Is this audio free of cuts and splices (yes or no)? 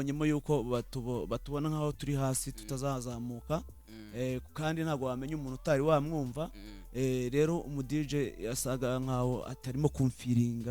yes